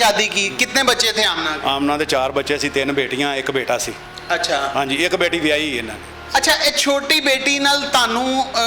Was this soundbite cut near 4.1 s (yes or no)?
no